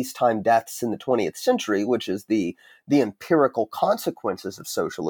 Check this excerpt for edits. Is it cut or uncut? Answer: uncut